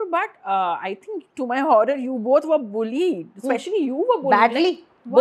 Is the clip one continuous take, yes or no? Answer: yes